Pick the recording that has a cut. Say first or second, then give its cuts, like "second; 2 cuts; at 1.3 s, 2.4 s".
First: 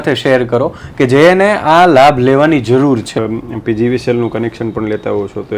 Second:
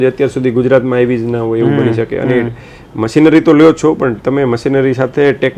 first; 1 cut; at 3.2 s